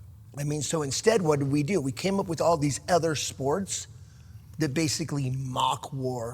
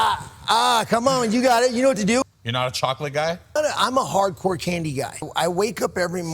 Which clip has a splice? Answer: second; 3 cuts; at 2.2 s, 3.6 s, 5.2 s

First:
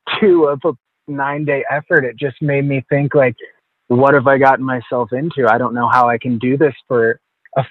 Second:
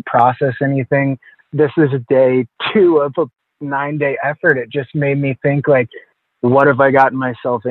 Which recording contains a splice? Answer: second; 1 cut; at 1.4 s

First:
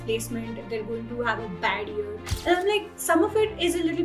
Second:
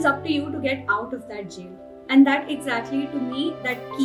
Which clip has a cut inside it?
first; 2 cuts; at 2.2 s, 2.9 s

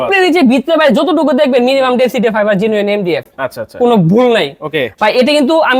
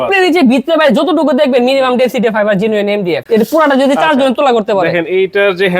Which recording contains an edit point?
second; 1 cut; at 3.2 s

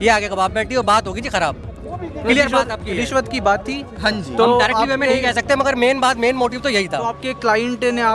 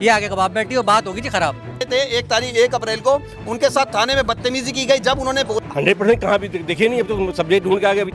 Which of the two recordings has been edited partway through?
second; 2 cuts; at 1.8 s, 5.6 s

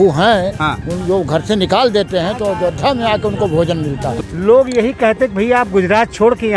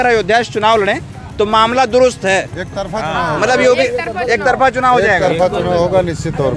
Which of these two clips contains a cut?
first; 1 cut; at 4.1 s

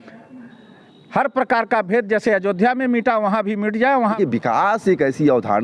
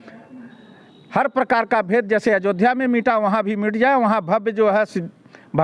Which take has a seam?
first; 1 cut; at 4.1 s

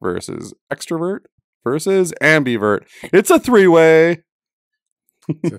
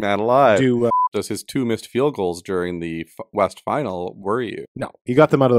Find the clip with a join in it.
second; 2 cuts; at 0.9 s, 4.7 s

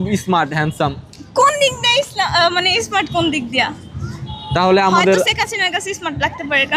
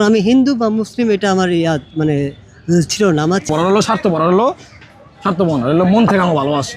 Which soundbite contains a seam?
second; 1 cut; at 3.5 s

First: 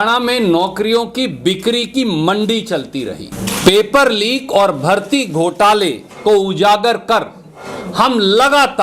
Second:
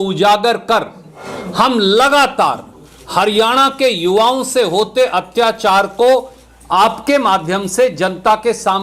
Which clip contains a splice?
first; 1 cut; at 3.3 s

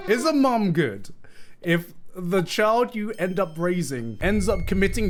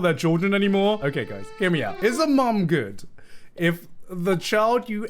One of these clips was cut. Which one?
second; 1 cut; at 1.0 s

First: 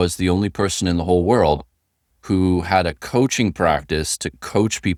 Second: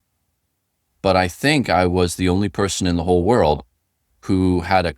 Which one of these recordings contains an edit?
second; 1 cut; at 1.0 s

